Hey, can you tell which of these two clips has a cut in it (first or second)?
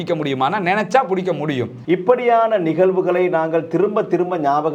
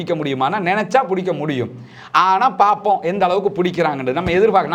first